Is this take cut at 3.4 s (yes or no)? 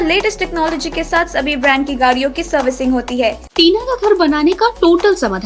yes